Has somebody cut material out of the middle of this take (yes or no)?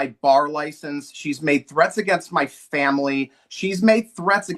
no